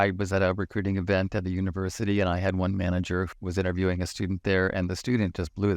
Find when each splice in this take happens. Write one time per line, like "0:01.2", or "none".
0:03.3